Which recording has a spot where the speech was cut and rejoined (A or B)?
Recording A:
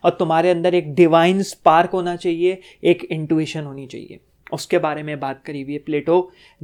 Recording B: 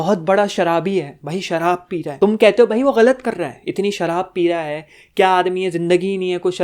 B